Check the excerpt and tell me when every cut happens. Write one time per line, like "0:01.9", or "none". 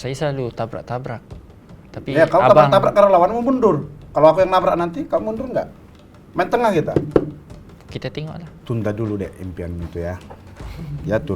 0:08.4